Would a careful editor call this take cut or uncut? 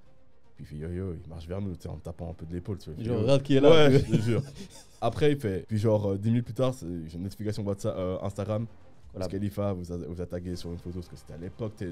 cut